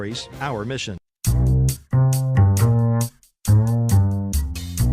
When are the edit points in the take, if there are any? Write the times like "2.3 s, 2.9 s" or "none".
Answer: 1.0 s